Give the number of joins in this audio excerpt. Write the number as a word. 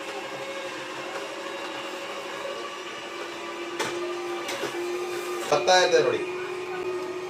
one